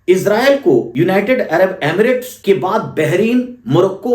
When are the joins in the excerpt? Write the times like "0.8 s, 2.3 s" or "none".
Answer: 0.9 s, 2.3 s